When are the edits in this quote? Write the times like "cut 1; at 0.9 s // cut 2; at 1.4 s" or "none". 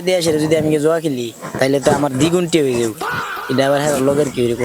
none